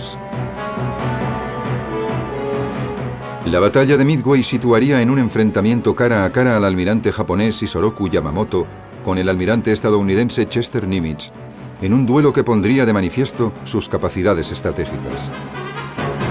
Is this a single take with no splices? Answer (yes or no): no